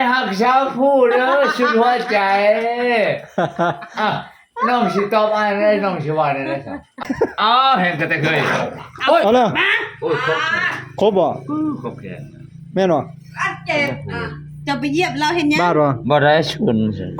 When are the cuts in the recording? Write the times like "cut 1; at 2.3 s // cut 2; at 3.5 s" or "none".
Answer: cut 1; at 7.0 s